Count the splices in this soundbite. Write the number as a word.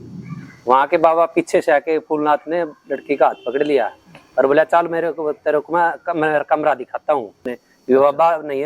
one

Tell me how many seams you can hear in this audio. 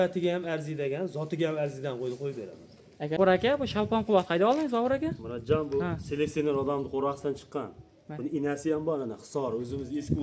one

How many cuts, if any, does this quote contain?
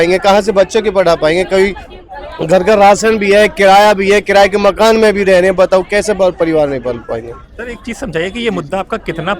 zero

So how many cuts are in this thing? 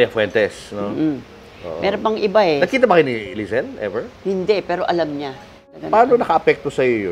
one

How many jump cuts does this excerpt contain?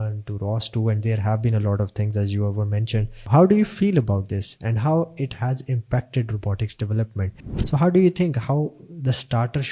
two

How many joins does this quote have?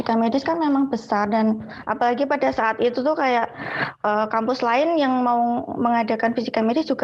zero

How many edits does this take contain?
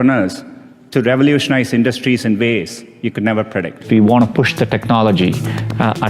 one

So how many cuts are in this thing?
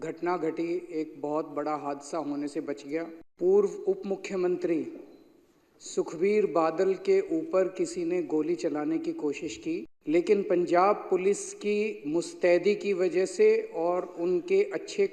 two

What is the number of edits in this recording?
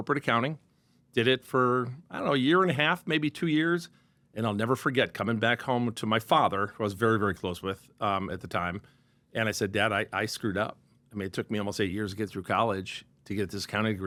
zero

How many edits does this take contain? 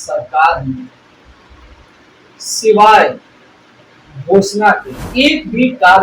one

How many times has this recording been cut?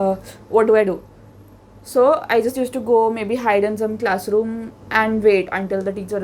one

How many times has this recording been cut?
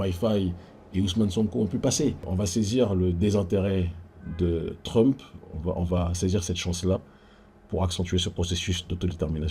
one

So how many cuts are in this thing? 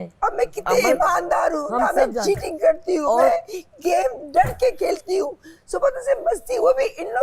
zero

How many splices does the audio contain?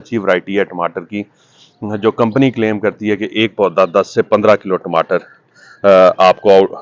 zero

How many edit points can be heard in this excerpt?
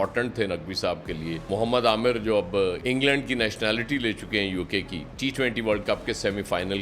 two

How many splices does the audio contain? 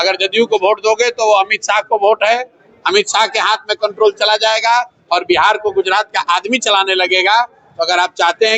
zero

